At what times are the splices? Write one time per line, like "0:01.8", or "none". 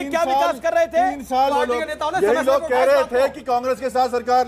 0:01.5